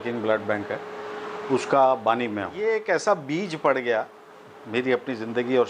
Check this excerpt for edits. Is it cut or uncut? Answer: cut